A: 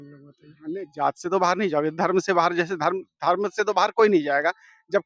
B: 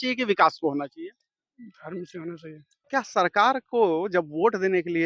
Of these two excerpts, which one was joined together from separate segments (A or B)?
B